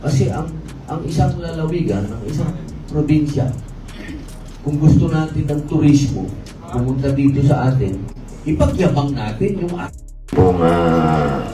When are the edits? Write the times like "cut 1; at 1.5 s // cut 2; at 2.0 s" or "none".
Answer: cut 1; at 10.2 s